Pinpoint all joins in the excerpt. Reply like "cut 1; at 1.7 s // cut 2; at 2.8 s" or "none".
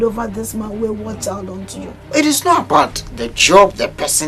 cut 1; at 1.9 s